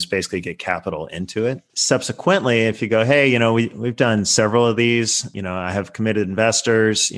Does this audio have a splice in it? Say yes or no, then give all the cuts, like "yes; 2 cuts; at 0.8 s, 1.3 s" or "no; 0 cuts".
yes; 1 cut; at 1.7 s